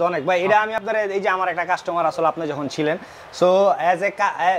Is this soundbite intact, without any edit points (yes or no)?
yes